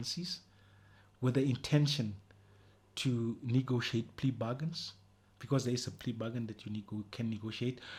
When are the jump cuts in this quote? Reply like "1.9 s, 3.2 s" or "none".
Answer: none